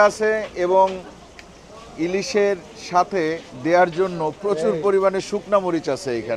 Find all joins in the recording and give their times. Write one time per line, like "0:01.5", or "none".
none

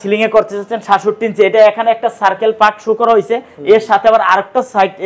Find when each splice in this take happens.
none

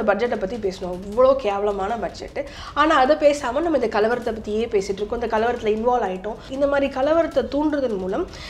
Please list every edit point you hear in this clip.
0:06.5

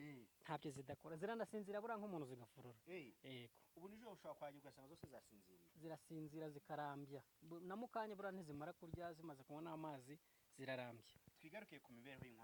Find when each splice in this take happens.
none

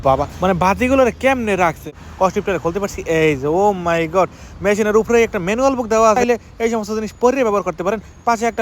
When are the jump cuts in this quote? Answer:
0:01.9

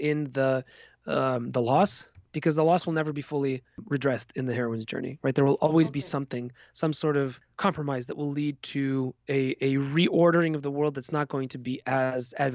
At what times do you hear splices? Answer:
0:03.8
0:07.4

